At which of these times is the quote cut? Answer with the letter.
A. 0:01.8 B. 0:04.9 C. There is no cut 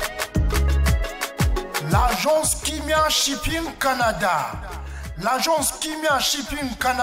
A